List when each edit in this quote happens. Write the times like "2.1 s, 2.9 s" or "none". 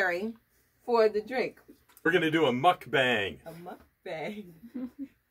2.1 s